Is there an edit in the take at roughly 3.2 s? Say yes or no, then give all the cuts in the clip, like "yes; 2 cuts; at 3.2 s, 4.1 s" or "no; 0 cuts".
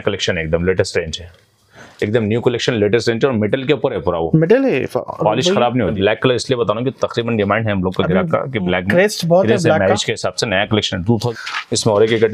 no; 2 cuts; at 5.7 s, 11.2 s